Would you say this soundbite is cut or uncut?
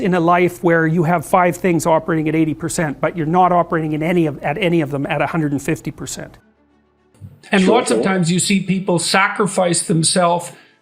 cut